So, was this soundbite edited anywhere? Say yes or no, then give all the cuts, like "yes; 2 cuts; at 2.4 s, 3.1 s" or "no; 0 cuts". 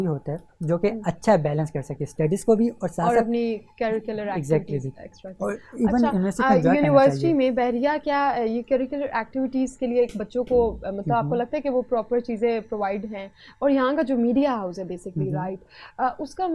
no; 0 cuts